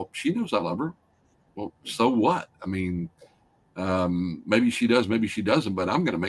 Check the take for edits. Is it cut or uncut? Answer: uncut